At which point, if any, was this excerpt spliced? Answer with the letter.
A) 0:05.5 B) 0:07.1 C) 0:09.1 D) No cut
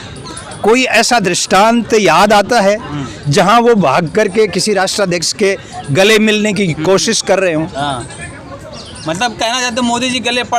D